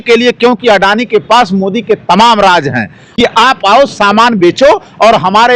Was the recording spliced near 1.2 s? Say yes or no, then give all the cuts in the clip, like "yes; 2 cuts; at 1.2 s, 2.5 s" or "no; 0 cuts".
no; 1 cut; at 3.0 s